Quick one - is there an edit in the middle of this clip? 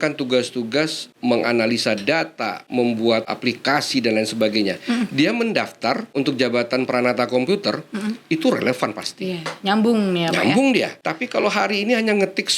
yes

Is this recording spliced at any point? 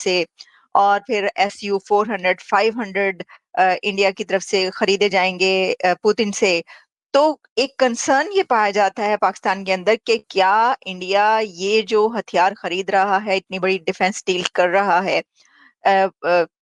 no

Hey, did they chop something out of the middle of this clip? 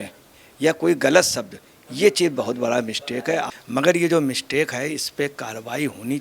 yes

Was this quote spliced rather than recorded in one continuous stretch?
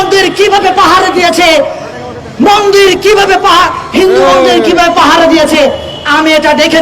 no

